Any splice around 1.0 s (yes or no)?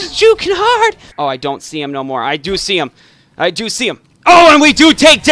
yes